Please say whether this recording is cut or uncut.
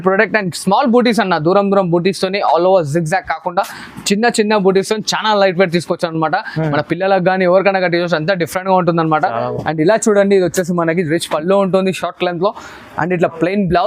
uncut